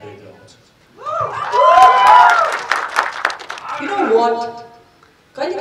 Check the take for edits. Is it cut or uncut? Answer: uncut